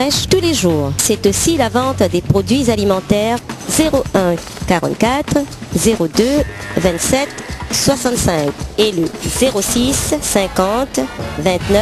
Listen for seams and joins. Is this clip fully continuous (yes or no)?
no